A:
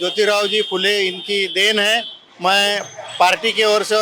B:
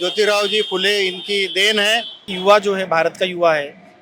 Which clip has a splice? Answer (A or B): B